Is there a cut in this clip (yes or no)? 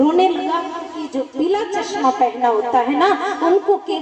yes